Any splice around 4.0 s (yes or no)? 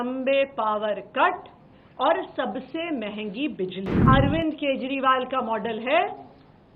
yes